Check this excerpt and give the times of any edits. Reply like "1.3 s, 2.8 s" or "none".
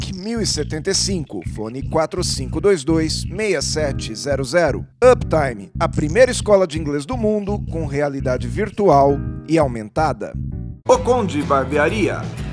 none